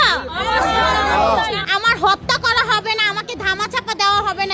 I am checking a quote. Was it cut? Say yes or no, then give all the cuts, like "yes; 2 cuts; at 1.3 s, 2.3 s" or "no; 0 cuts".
yes; 1 cut; at 1.6 s